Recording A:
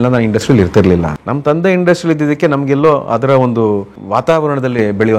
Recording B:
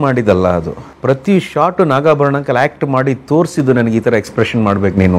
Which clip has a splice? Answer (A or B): A